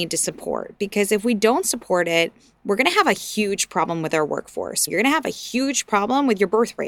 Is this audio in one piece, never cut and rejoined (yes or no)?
no